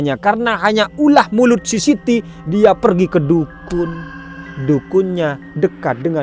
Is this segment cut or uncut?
uncut